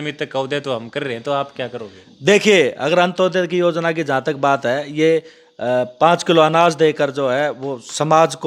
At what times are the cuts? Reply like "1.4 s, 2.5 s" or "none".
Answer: none

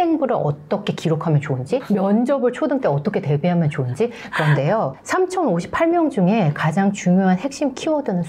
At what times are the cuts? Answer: none

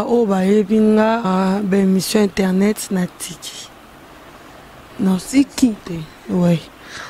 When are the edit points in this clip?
1.3 s

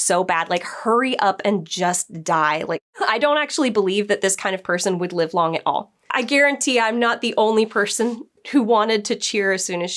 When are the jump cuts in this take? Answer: 2.9 s, 5.9 s

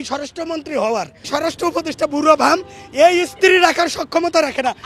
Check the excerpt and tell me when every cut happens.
1.3 s

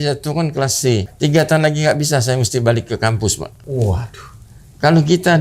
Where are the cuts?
1.1 s, 3.6 s

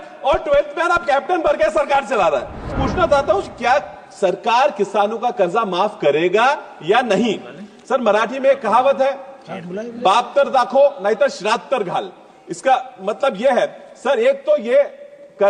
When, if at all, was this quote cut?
2.8 s

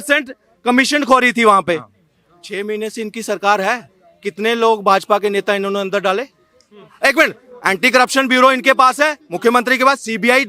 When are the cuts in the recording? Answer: none

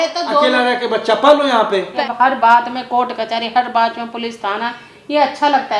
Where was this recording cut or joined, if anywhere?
1.9 s

